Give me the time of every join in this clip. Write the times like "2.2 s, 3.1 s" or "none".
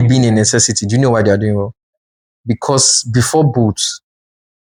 none